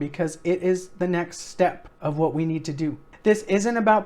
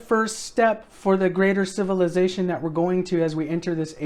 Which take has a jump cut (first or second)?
first